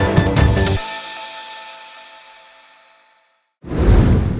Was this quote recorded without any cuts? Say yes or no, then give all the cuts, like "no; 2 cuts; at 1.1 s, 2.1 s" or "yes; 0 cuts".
no; 1 cut; at 3.5 s